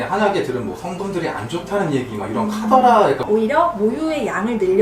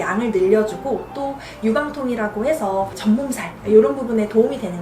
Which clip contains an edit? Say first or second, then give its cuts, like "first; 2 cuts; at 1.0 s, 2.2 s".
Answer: first; 1 cut; at 3.2 s